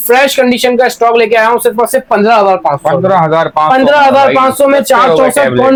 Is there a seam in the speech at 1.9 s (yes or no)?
no